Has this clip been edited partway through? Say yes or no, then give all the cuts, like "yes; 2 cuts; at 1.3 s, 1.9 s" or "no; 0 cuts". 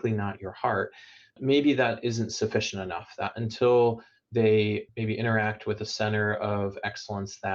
yes; 1 cut; at 1.3 s